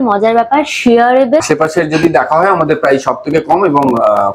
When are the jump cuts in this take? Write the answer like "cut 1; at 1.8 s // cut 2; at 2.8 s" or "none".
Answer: cut 1; at 1.4 s